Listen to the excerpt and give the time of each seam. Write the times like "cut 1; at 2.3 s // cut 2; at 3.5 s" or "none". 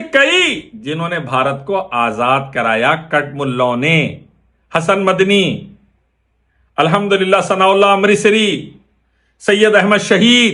none